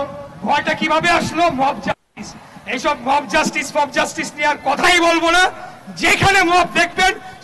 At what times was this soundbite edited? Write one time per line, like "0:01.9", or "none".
none

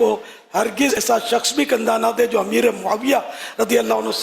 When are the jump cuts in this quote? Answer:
0:00.9

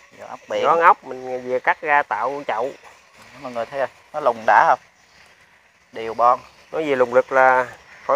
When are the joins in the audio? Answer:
none

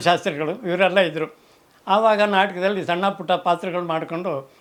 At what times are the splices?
none

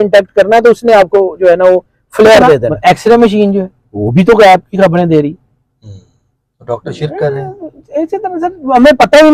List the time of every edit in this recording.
0:02.7

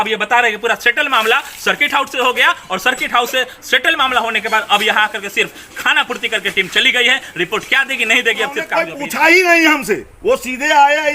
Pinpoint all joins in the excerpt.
0:08.8

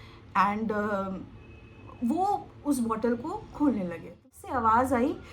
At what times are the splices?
0:04.3

